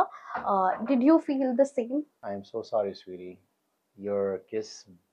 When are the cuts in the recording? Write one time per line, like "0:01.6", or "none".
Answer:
0:02.2